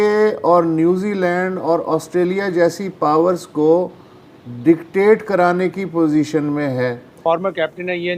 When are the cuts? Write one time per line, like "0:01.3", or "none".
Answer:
0:07.1